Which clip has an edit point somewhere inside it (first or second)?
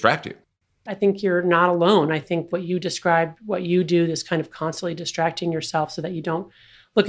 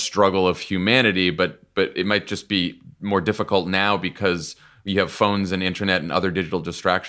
first